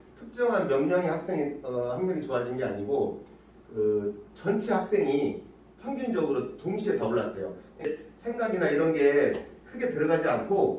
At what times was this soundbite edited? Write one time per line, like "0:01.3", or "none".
0:07.8